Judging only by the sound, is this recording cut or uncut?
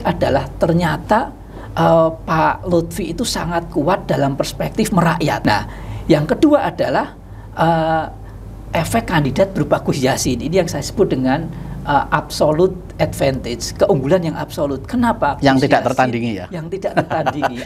cut